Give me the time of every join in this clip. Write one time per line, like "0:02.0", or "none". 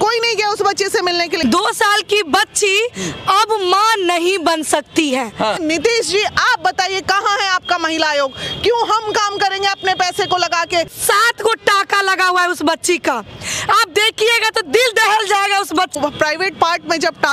0:01.3
0:05.6
0:11.0
0:15.9